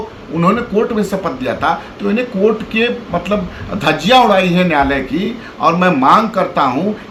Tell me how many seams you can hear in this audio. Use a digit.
0